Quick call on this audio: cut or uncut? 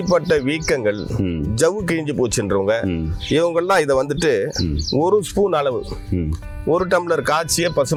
uncut